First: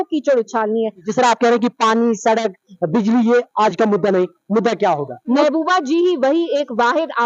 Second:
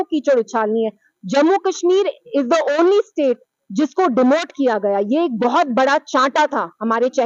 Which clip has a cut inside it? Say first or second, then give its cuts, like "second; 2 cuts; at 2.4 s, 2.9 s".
first; 2 cuts; at 1.0 s, 5.4 s